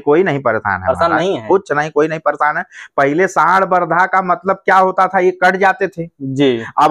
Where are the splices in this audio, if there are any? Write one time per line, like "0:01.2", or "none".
none